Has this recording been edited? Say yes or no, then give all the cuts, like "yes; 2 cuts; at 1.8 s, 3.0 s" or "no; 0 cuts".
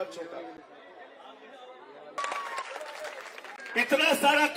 yes; 1 cut; at 2.2 s